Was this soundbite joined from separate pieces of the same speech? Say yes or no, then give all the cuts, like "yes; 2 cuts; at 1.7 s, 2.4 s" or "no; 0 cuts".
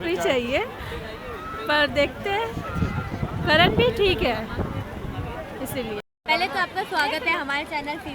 no; 0 cuts